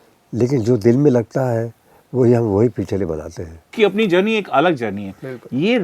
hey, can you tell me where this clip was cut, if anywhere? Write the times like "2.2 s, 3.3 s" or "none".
3.7 s